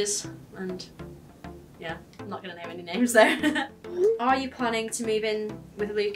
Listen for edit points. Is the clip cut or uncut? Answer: cut